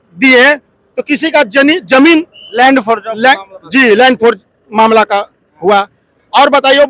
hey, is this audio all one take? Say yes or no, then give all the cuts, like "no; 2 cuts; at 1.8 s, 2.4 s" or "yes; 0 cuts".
yes; 0 cuts